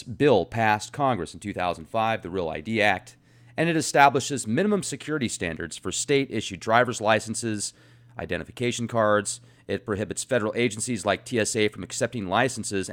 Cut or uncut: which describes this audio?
cut